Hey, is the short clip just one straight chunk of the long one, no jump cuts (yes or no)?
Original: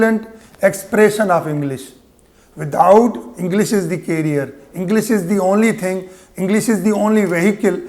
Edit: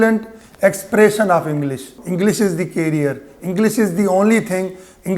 no